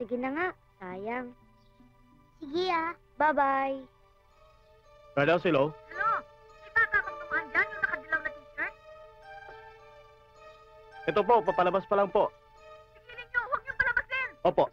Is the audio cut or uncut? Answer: cut